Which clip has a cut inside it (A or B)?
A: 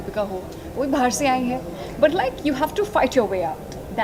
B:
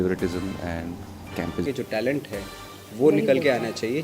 B